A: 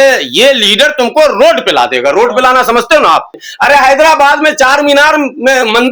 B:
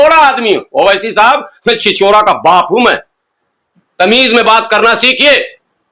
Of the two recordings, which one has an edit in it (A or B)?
A